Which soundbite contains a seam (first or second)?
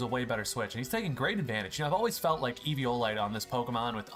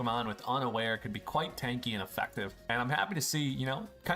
second